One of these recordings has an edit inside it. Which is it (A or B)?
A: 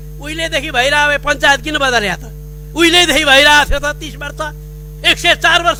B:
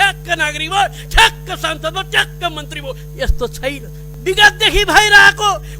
B